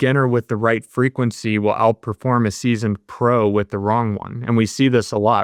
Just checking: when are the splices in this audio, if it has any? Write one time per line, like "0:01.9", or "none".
none